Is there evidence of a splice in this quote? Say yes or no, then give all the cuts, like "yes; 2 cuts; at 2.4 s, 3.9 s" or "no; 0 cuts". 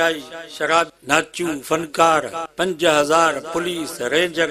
yes; 2 cuts; at 0.9 s, 2.4 s